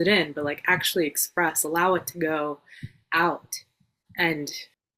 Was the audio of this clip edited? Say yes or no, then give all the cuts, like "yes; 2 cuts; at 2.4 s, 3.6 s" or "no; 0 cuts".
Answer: yes; 1 cut; at 4.0 s